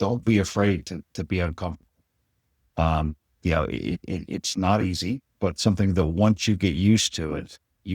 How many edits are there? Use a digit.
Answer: 0